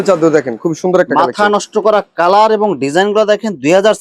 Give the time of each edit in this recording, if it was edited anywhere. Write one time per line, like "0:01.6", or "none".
none